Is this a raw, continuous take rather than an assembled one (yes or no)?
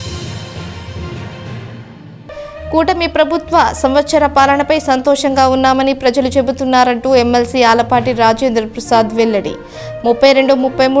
yes